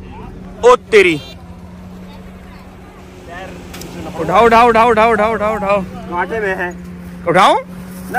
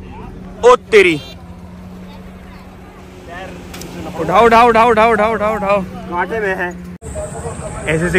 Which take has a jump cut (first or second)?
second